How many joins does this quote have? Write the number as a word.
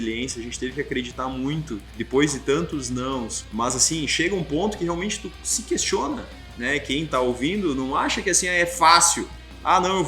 two